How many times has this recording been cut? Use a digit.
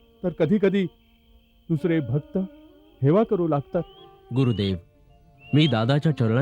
1